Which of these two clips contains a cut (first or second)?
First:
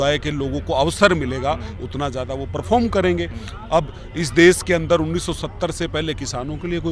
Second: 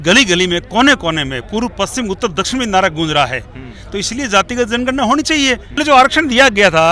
second